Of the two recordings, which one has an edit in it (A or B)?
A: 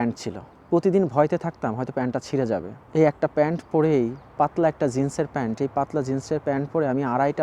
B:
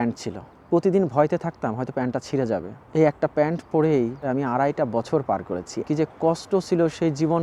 B